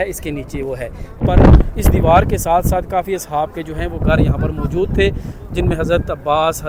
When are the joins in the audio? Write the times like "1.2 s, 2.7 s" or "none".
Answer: none